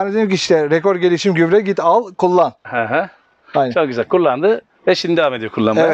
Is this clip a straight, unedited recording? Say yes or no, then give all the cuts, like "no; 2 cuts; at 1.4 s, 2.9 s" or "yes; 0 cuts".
yes; 0 cuts